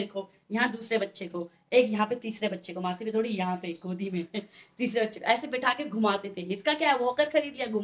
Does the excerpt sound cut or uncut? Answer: uncut